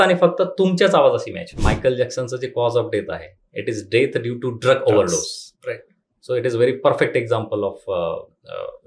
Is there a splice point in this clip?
yes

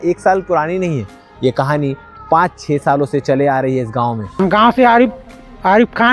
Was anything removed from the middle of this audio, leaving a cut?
yes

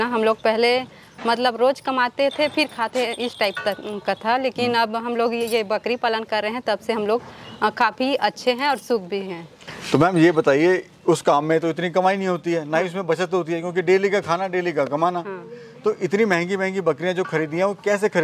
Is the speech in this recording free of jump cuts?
yes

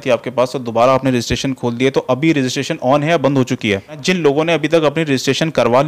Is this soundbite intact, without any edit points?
no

